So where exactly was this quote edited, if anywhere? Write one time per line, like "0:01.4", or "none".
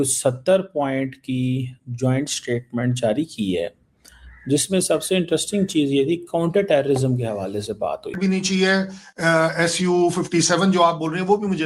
0:08.2